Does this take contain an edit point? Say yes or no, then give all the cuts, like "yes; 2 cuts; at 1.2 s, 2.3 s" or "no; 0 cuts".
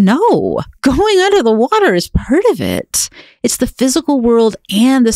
no; 0 cuts